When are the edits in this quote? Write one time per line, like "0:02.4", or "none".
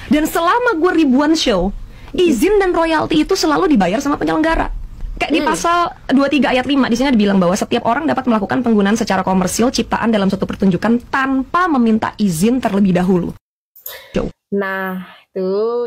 none